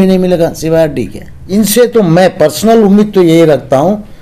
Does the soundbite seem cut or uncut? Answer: cut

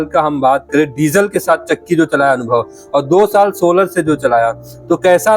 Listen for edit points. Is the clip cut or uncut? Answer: uncut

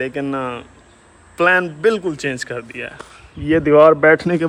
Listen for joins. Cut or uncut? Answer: uncut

